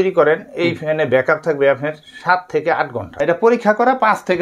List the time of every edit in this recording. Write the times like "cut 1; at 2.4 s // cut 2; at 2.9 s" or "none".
cut 1; at 3.1 s